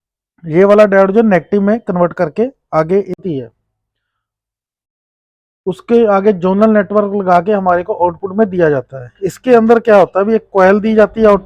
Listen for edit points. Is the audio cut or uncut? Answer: cut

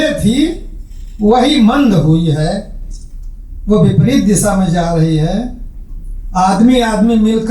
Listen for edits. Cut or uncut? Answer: uncut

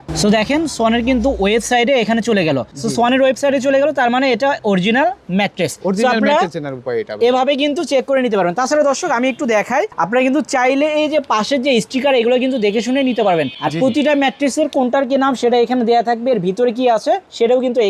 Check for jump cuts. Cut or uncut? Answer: uncut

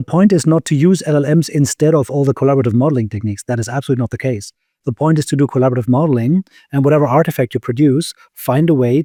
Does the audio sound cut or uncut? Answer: uncut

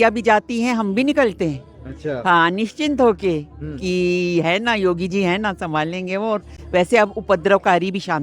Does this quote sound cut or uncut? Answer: uncut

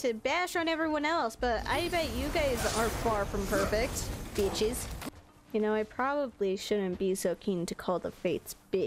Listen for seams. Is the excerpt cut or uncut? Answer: cut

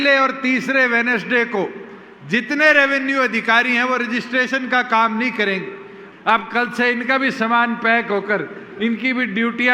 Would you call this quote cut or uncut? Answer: cut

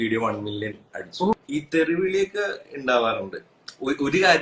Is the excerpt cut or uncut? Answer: cut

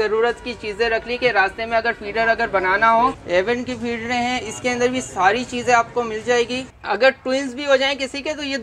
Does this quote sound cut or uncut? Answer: cut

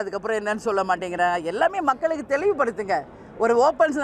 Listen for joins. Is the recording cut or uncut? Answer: uncut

